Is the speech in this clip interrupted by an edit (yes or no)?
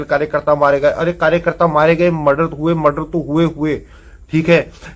no